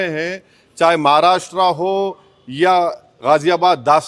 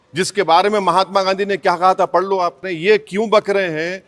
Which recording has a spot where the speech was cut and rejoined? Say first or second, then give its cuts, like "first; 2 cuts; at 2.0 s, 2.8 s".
second; 1 cut; at 2.7 s